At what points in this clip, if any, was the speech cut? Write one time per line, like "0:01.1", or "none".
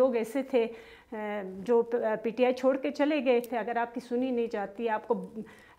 0:03.5